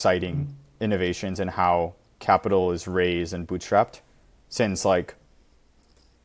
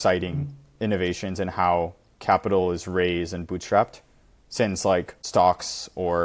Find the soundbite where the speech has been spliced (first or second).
second